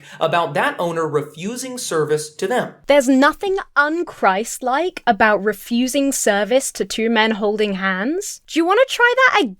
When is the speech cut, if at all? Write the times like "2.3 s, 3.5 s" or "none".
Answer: none

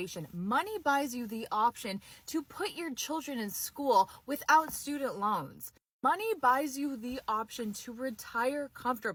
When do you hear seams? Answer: none

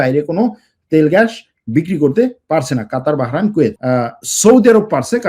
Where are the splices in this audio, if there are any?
3.8 s

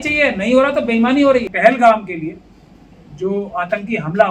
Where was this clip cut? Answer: 1.5 s

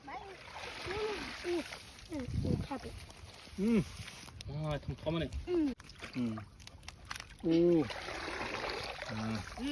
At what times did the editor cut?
none

